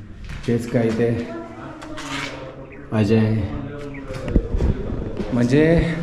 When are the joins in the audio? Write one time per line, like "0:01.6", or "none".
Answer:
none

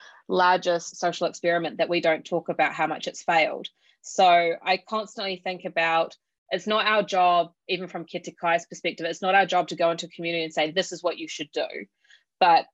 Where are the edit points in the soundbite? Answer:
0:00.9

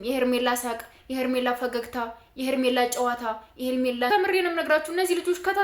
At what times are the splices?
0:04.1

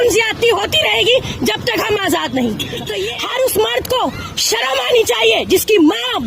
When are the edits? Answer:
0:02.9

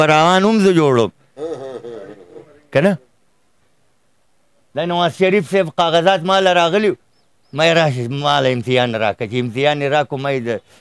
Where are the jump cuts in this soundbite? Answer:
none

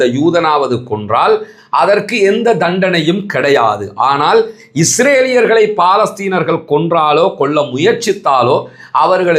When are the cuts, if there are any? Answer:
none

